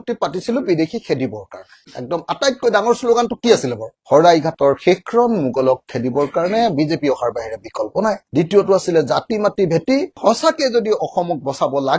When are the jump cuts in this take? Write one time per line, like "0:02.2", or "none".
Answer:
none